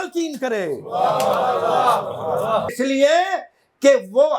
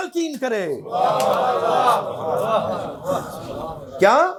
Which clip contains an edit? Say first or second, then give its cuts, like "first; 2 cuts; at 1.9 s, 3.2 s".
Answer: first; 1 cut; at 2.7 s